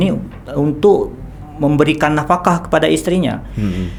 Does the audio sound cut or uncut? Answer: uncut